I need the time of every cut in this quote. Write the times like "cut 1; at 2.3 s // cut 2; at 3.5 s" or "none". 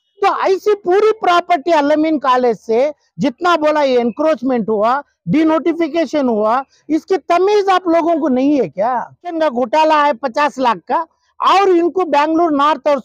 cut 1; at 9.3 s